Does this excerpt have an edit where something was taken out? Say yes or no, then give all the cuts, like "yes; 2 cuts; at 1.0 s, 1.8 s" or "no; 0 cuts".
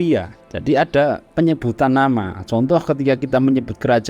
yes; 1 cut; at 1.3 s